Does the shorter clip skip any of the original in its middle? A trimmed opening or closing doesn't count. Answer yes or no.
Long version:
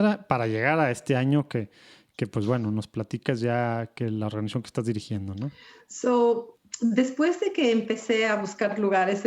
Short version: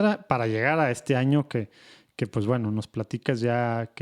no